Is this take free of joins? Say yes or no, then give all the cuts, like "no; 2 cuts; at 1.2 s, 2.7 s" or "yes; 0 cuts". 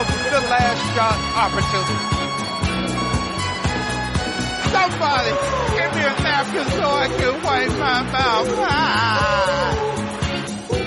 yes; 0 cuts